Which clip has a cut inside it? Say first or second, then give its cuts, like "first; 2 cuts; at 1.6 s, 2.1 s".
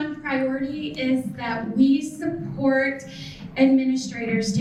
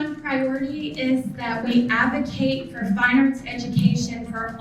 second; 1 cut; at 1.7 s